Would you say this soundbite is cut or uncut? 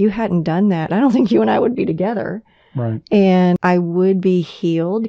cut